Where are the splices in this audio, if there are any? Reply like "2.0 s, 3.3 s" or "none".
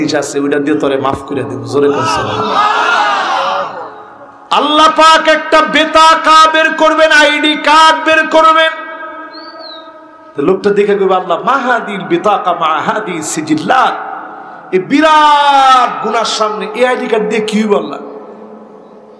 none